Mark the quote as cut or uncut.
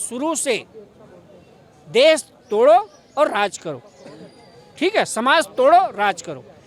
uncut